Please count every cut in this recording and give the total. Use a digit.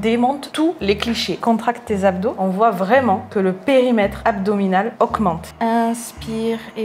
3